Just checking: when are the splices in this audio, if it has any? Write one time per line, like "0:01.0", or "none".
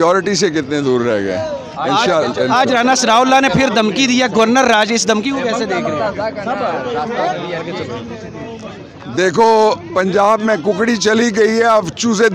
none